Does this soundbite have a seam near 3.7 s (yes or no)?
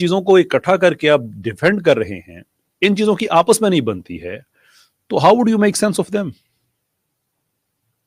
no